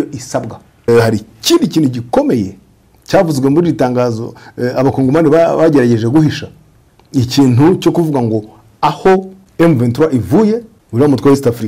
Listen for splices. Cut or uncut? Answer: cut